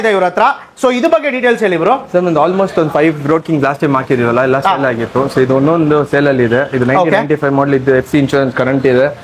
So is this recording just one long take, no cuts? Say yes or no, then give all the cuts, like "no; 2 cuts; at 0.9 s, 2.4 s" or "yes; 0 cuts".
yes; 0 cuts